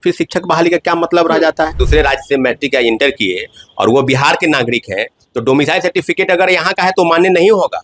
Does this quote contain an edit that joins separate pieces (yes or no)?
yes